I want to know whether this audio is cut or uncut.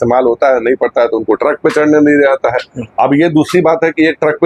uncut